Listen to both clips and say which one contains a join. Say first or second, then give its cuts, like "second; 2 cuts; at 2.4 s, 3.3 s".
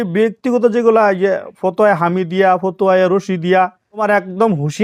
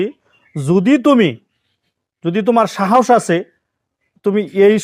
first; 1 cut; at 3.9 s